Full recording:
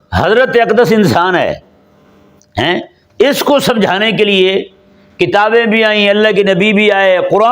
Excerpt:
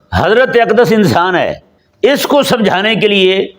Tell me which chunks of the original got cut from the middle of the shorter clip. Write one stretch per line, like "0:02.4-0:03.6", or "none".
0:01.8-0:03.0